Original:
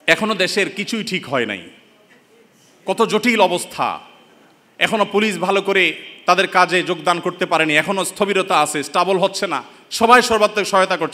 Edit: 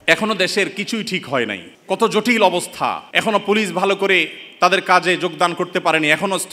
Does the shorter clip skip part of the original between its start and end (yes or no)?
yes